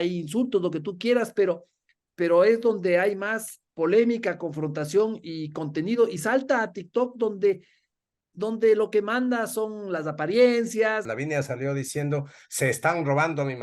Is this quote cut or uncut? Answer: cut